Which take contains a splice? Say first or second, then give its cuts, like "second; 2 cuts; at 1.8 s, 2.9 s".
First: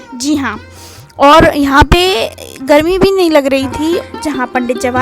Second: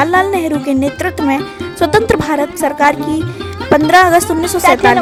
first; 1 cut; at 4.0 s